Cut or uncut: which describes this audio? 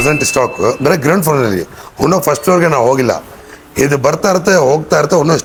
uncut